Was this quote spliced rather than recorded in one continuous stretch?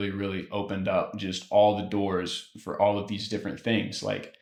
no; 0 cuts

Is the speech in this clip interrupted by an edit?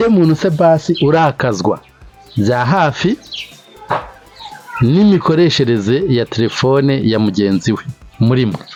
no; 0 cuts

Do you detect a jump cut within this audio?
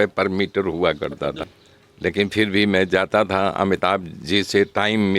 yes; 1 cut; at 1.4 s

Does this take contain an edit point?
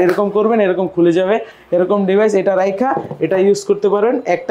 no; 0 cuts

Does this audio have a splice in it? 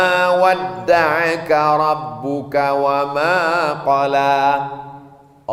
no; 0 cuts

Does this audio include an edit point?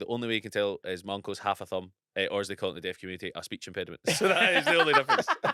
no; 0 cuts

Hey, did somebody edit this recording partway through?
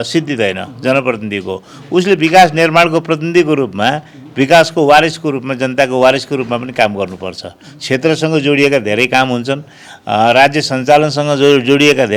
no; 0 cuts

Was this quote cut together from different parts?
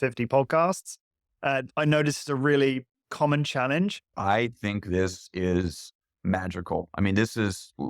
yes; 1 cut; at 4.1 s

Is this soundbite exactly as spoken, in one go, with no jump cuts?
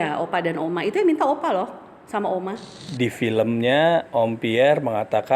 no; 1 cut; at 2.8 s

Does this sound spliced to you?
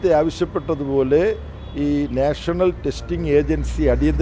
no; 0 cuts

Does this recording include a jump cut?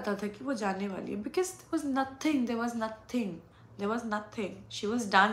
no; 0 cuts

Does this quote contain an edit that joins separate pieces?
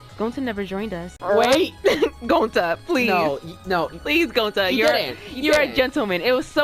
yes; 1 cut; at 1.1 s

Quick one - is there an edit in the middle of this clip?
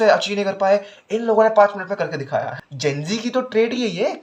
yes; 1 cut; at 2.5 s

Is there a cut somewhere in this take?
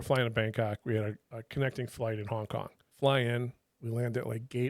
yes; 1 cut; at 2.8 s

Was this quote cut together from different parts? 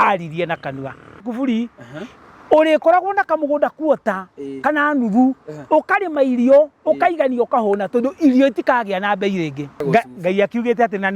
yes; 2 cuts; at 1.2 s, 9.7 s

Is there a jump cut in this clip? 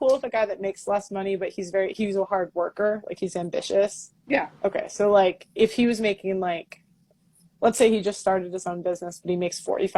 yes; 2 cuts; at 3.3 s, 4.1 s

